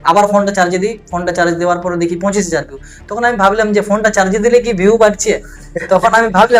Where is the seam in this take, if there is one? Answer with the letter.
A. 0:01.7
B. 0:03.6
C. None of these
C